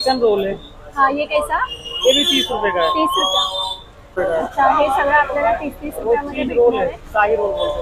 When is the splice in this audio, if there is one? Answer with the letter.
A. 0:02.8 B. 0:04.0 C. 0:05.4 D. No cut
B